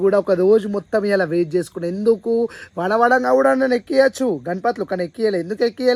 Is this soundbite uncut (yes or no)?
yes